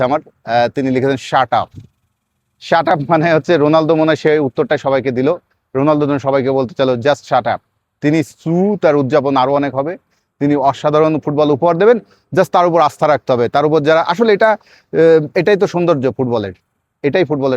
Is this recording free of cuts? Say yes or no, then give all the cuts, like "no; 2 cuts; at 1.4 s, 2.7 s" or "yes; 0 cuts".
yes; 0 cuts